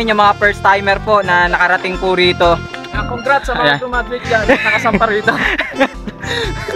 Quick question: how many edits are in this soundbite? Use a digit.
0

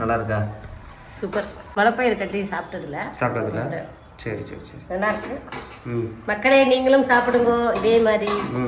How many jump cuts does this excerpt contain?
1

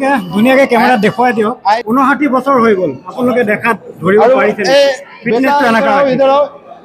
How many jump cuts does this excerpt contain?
1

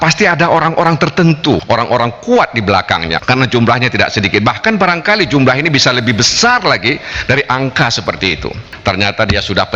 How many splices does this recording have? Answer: 3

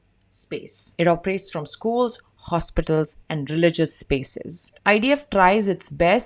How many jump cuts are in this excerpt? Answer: 1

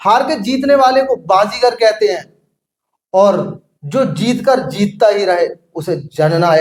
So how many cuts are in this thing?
0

